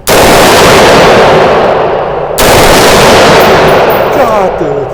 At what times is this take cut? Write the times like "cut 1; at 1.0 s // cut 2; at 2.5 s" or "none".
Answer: none

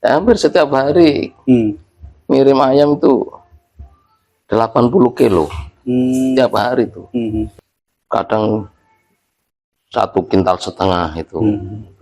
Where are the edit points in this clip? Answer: cut 1; at 7.5 s

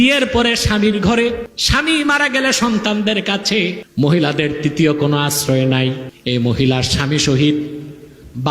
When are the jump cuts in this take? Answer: cut 1; at 1.5 s // cut 2; at 3.8 s // cut 3; at 6.1 s

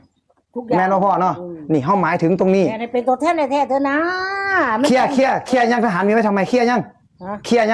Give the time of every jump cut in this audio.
none

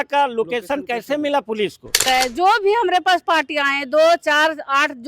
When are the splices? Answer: cut 1; at 2.0 s

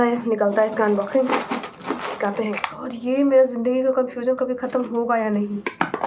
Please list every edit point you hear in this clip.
cut 1; at 2.6 s

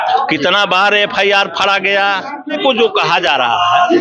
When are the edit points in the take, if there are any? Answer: cut 1; at 2.6 s

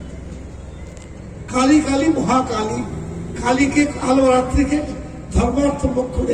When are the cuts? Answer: none

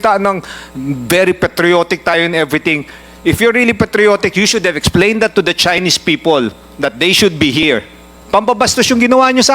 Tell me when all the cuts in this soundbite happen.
none

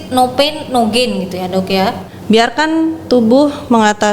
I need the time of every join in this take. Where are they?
cut 1; at 2.1 s

